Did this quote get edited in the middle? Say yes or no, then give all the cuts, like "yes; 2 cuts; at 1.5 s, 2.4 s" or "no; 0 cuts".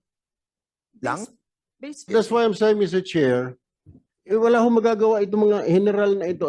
yes; 1 cut; at 2.1 s